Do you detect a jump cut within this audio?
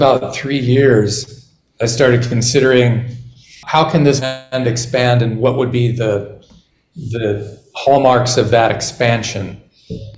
yes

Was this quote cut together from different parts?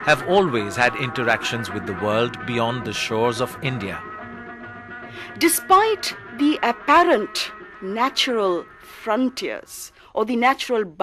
yes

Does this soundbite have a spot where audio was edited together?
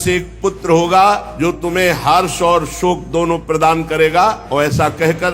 yes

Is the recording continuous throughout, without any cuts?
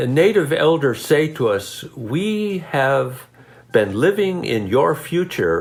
yes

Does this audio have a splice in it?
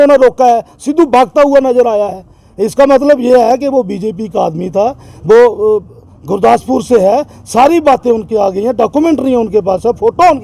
no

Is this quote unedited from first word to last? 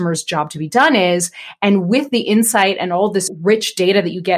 no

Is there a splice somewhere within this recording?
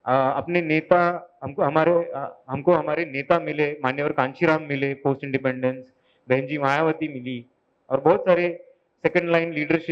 no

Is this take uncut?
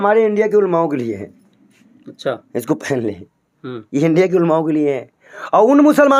yes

